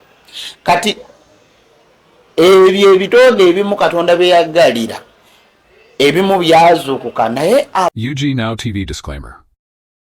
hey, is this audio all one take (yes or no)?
no